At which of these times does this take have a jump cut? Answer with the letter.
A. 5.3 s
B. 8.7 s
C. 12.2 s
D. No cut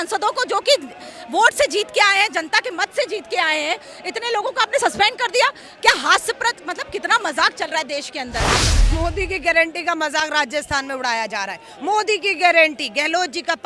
B